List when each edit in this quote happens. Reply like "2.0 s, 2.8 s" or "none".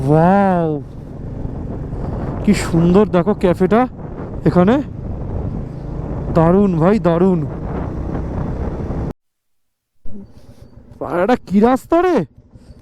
9.1 s